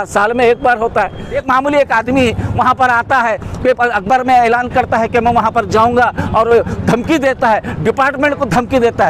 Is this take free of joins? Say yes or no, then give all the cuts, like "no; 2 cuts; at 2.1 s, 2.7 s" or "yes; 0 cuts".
no; 1 cut; at 1.4 s